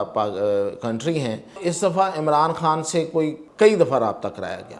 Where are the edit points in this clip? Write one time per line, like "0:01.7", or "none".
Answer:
0:01.6
0:03.4